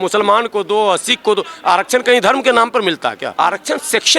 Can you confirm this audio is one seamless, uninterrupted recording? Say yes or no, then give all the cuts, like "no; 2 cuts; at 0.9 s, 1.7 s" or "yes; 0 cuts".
no; 1 cut; at 3.2 s